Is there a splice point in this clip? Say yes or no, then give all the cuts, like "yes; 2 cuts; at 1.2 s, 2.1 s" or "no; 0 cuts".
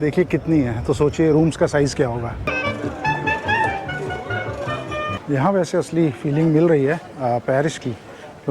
yes; 2 cuts; at 2.5 s, 5.2 s